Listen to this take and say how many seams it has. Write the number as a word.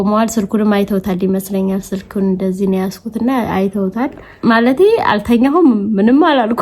one